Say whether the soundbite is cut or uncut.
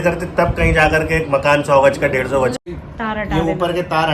cut